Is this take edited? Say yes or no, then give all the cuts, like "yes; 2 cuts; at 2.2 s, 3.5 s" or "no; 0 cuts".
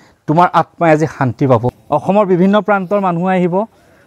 yes; 1 cut; at 1.8 s